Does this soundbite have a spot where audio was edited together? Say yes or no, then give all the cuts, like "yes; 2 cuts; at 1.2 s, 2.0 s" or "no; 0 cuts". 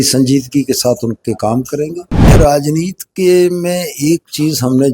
yes; 1 cut; at 2.3 s